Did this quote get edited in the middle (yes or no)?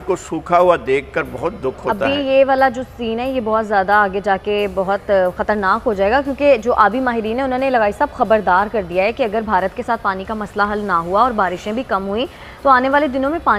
no